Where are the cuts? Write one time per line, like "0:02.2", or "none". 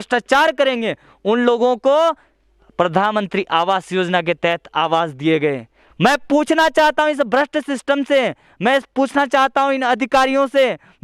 none